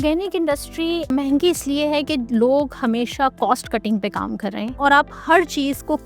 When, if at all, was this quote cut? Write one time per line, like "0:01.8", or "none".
0:01.1
0:04.8